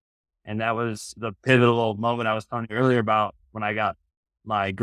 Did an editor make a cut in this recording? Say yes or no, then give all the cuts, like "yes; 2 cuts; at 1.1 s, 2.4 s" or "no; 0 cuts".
no; 0 cuts